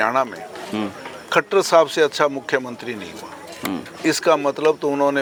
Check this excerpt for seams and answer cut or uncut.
uncut